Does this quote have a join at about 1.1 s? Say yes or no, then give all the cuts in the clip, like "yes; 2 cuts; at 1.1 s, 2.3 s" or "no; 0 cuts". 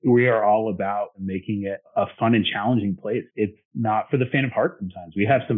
yes; 2 cuts; at 1.1 s, 3.3 s